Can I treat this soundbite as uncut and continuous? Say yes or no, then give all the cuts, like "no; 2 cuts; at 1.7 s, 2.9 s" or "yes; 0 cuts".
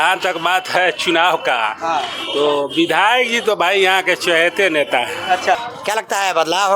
no; 1 cut; at 5.6 s